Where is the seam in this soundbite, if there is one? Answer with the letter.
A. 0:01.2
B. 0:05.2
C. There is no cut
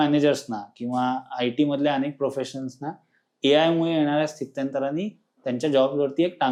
C